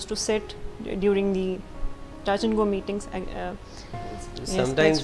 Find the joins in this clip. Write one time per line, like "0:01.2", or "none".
0:03.9